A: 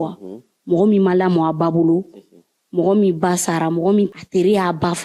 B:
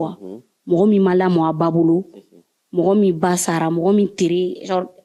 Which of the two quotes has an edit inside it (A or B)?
A